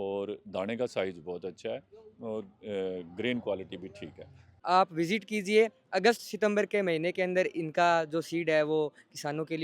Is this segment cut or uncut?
cut